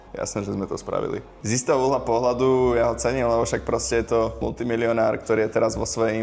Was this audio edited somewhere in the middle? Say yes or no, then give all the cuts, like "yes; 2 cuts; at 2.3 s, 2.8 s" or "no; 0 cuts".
yes; 2 cuts; at 1.4 s, 4.4 s